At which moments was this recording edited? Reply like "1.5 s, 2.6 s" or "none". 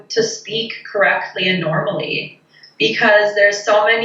2.6 s

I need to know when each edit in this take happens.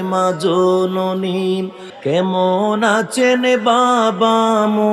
1.8 s

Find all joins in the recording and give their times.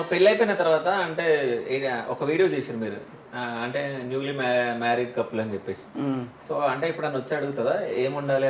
none

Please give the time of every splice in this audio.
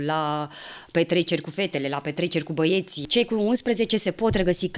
3.0 s

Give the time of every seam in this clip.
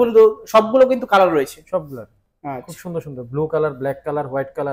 none

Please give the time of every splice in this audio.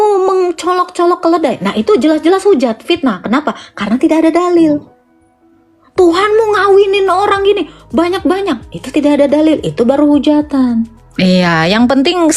11.0 s

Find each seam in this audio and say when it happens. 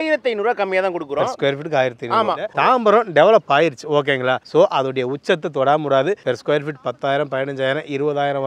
2.5 s

